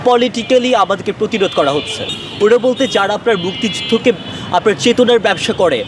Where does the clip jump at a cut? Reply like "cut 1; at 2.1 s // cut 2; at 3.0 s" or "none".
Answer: none